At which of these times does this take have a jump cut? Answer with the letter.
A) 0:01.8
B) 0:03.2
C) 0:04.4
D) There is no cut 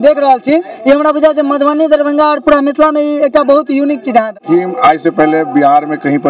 C